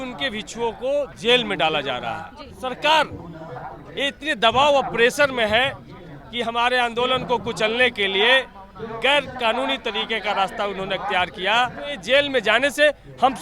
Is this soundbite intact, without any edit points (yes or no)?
no